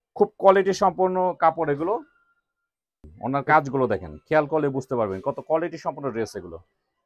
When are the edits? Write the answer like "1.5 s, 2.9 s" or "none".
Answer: 3.1 s